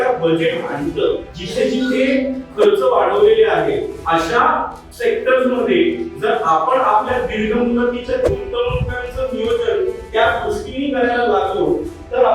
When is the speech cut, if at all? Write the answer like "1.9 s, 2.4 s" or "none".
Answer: 1.3 s, 4.0 s, 4.8 s